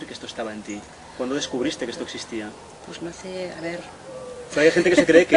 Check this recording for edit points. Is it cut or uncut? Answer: uncut